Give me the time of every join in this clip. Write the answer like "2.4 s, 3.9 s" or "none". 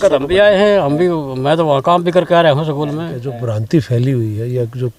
3.5 s